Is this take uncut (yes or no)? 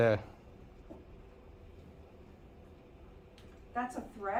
yes